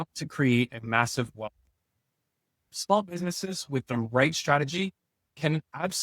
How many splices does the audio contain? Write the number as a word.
one